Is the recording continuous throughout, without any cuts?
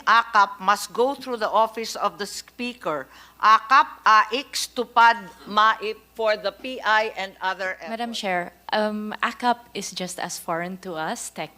no; 1 cut; at 7.8 s

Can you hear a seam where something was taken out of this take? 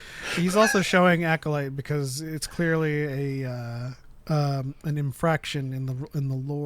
no; 0 cuts

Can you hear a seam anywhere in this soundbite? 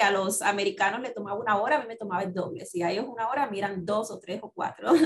no; 0 cuts

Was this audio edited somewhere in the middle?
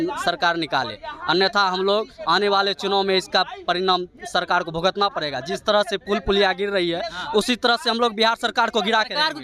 no; 0 cuts

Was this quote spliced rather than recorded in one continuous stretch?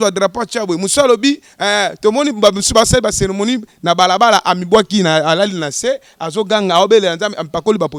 no; 0 cuts

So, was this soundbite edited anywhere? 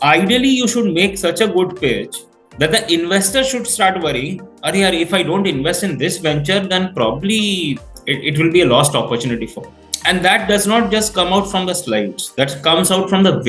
yes; 1 cut; at 9.8 s

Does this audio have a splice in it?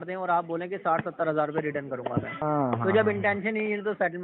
yes; 1 cut; at 2.4 s

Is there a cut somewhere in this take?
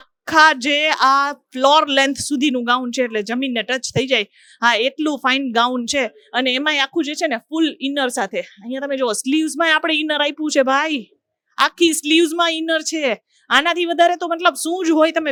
no; 0 cuts

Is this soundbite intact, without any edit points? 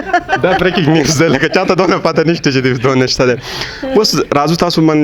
yes; 0 cuts

